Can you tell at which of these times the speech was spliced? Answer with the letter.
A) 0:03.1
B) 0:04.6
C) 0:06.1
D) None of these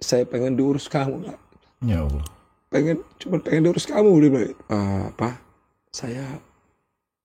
B